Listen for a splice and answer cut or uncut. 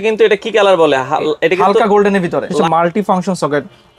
cut